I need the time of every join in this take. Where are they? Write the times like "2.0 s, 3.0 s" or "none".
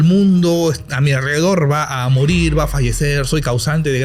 none